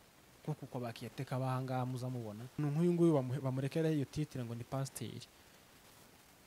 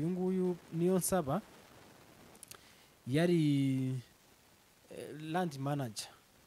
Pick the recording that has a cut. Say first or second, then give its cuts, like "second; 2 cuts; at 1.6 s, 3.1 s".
first; 1 cut; at 2.6 s